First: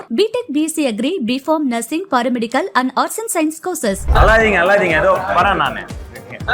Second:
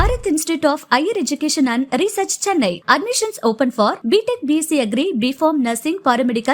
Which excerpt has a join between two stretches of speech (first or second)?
first